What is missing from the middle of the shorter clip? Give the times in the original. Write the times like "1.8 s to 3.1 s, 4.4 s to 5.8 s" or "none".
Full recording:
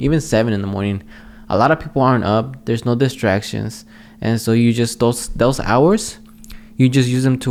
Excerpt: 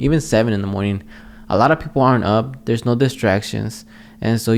none